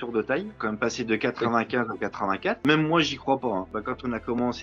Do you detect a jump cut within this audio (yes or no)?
yes